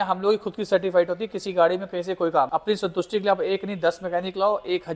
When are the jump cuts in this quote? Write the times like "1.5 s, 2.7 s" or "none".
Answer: 2.5 s